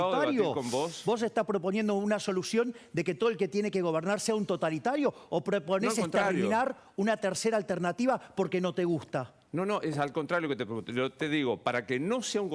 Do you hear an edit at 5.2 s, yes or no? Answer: no